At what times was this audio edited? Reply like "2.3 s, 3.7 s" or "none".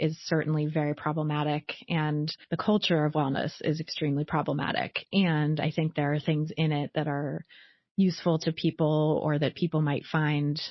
2.4 s